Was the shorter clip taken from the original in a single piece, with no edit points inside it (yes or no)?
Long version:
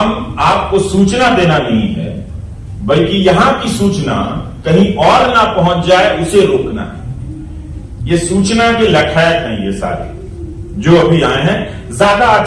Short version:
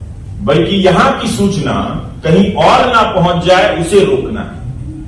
yes